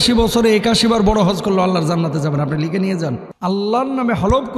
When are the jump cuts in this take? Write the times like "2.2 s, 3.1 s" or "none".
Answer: 3.3 s